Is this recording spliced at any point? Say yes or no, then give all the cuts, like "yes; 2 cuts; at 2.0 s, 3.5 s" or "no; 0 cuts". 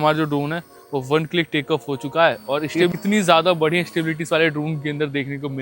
yes; 1 cut; at 2.9 s